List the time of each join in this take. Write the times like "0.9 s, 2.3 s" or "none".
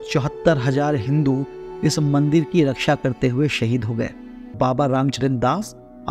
4.5 s